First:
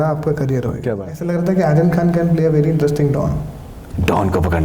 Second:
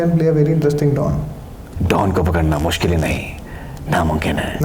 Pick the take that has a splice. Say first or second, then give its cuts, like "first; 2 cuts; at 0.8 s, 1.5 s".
first; 1 cut; at 1.2 s